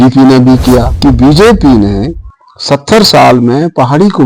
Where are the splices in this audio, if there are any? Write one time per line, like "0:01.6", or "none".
0:00.9